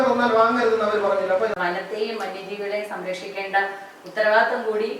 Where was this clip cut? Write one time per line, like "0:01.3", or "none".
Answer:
0:01.5